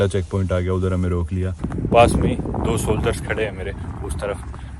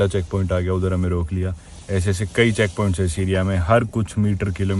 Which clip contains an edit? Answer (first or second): first